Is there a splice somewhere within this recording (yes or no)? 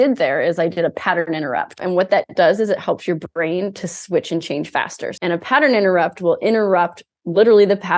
yes